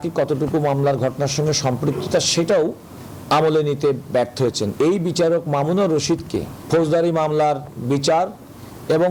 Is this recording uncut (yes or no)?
yes